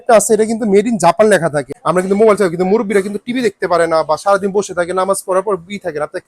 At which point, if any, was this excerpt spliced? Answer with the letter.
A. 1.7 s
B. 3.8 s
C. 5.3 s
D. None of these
A